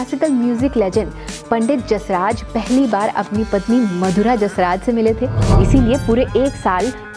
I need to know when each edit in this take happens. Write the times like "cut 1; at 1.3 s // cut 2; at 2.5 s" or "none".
cut 1; at 5.5 s